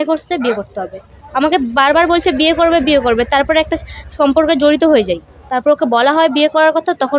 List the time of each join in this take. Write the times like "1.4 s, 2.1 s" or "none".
1.2 s, 5.3 s

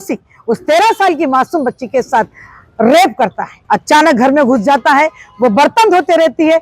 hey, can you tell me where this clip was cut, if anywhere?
3.5 s

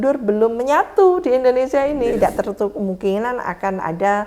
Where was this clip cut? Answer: 2.0 s

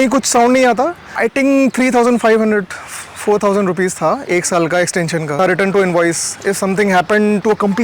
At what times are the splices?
1.0 s, 5.4 s

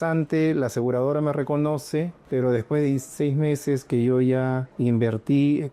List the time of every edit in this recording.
2.2 s, 4.7 s

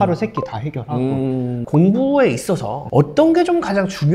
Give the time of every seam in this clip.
1.6 s, 2.8 s

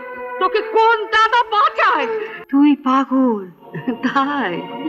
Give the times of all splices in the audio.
2.3 s

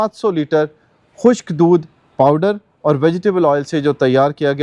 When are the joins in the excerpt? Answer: none

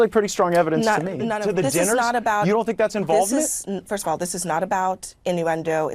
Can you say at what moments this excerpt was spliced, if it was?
1.3 s

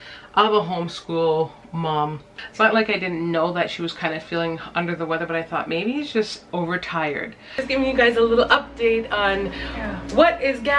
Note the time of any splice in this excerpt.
2.4 s, 7.6 s

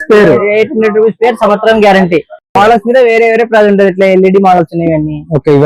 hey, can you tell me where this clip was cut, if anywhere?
none

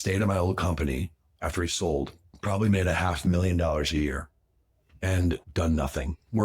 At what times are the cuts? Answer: 5.5 s

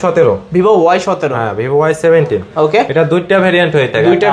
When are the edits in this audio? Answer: none

